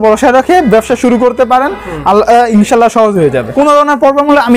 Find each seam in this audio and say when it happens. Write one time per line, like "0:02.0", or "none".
0:03.5